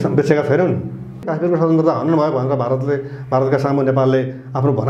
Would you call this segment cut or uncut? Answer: cut